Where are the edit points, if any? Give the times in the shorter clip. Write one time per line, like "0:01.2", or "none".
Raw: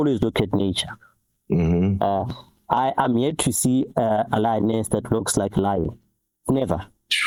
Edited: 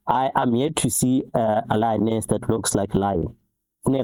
none